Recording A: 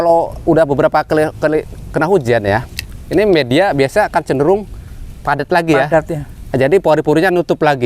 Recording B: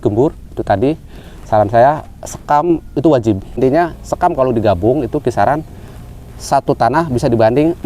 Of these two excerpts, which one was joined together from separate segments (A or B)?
B